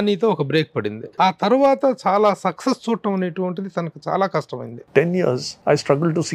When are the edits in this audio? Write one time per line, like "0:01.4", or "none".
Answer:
0:01.0
0:04.9